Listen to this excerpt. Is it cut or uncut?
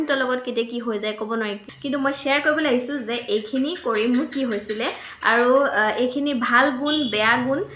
cut